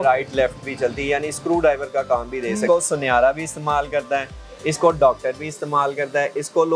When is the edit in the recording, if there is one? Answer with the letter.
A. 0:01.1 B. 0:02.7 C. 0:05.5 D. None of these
B